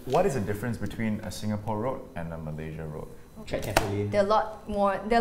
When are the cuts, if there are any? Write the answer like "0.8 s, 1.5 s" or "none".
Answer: none

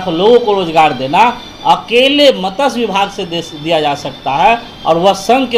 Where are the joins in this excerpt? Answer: none

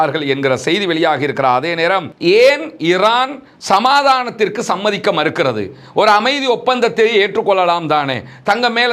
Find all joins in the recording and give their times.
2.1 s

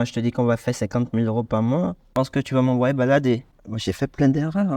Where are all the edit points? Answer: 3.5 s

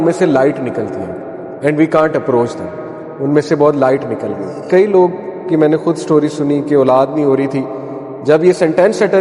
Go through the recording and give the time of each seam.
4.7 s

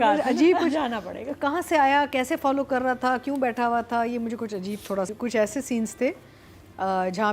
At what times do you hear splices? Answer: 5.1 s

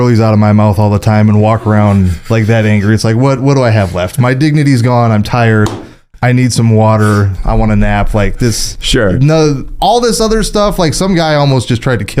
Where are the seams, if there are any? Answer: none

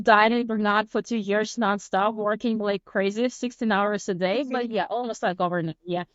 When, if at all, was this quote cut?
none

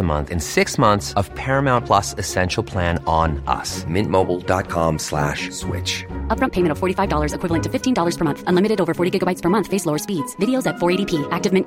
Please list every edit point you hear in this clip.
none

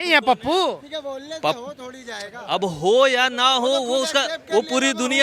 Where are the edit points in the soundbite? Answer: none

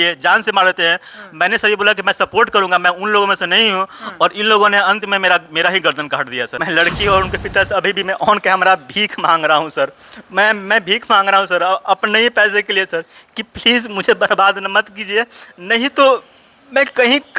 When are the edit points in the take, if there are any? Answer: 6.6 s

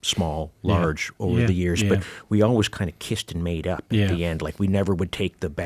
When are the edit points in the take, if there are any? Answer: none

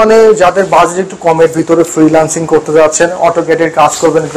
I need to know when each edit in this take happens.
none

